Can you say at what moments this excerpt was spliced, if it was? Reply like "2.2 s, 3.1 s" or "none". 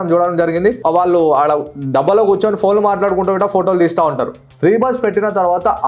4.5 s